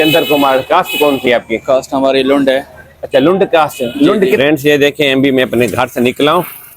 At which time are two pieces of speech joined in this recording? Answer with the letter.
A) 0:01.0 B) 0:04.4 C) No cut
B